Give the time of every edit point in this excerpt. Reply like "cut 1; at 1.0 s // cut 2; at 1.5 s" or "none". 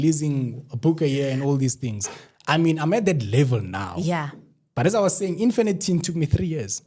none